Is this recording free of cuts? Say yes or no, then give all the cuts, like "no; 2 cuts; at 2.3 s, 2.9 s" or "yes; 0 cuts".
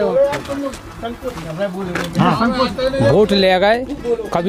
yes; 0 cuts